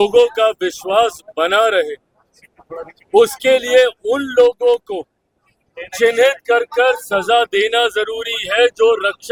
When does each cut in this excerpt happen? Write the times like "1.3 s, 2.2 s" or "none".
none